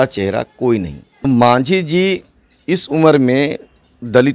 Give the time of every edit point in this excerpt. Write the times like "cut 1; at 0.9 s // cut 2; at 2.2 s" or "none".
cut 1; at 1.2 s

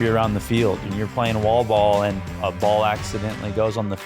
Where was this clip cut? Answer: cut 1; at 0.9 s // cut 2; at 2.3 s

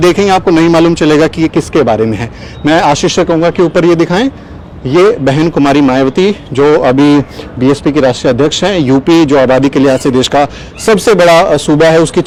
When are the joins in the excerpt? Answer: none

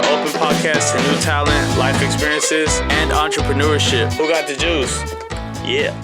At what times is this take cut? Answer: none

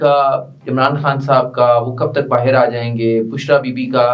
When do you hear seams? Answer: none

